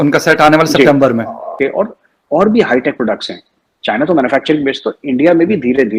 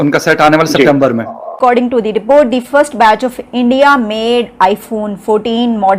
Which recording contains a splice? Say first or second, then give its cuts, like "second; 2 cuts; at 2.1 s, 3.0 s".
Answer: second; 1 cut; at 1.6 s